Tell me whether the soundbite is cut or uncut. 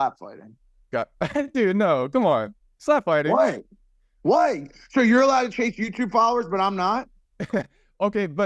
uncut